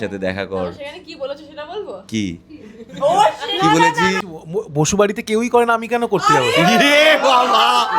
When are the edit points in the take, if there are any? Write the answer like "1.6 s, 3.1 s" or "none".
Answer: 4.1 s